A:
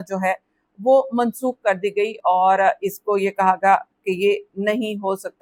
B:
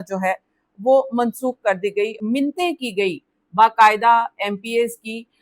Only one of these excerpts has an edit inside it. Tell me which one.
B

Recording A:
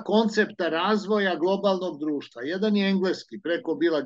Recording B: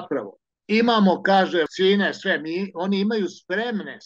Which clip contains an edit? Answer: B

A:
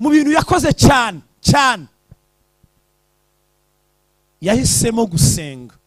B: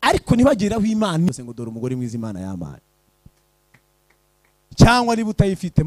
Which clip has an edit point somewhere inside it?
B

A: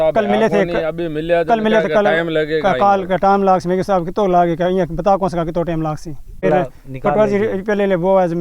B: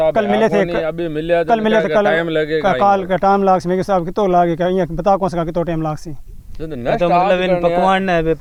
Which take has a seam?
A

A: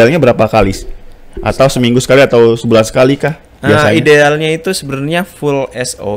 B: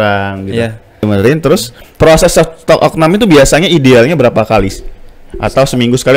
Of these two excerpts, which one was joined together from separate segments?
B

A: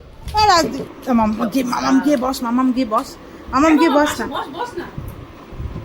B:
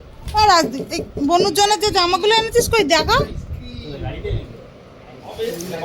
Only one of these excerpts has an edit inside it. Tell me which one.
A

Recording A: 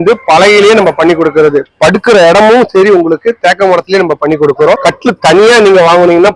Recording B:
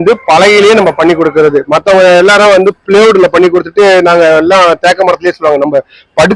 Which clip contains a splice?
A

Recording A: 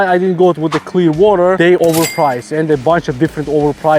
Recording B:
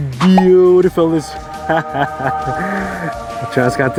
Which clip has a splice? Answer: A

